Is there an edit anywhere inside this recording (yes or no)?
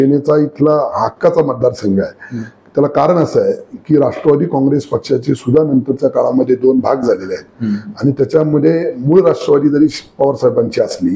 no